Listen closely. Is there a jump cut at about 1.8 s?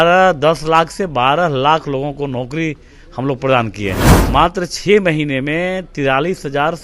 no; 1 cut; at 4.1 s

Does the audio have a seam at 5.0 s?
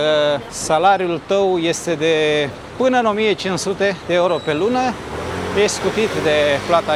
no; 0 cuts

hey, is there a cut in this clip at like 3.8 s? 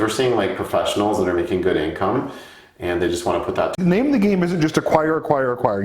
yes; 1 cut; at 3.8 s

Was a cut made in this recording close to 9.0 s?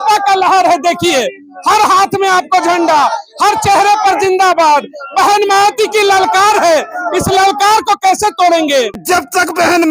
yes; 1 cut; at 9.0 s

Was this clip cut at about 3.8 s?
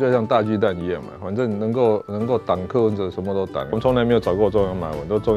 yes; 1 cut; at 3.8 s

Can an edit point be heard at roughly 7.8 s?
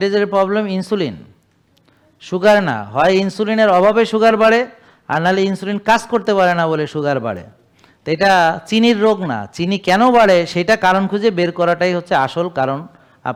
no; 0 cuts

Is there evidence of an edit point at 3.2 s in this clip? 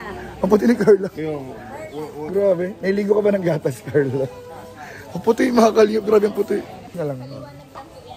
no; 1 cut; at 7.0 s

